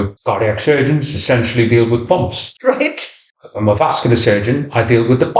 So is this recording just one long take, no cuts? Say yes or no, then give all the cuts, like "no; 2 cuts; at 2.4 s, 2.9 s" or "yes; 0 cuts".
yes; 0 cuts